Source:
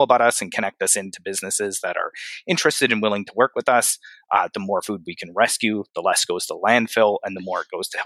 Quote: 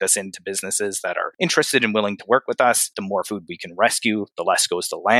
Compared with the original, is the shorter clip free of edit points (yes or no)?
no